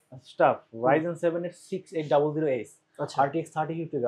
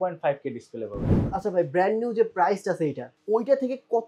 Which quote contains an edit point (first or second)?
second